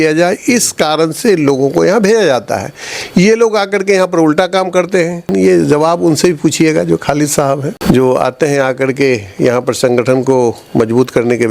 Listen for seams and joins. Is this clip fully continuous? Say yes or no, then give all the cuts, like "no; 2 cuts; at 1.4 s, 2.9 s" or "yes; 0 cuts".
no; 2 cuts; at 5.3 s, 7.7 s